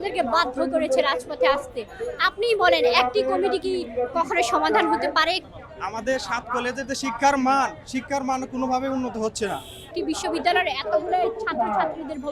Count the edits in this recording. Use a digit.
2